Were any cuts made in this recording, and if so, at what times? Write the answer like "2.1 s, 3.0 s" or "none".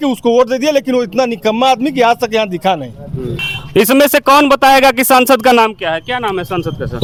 none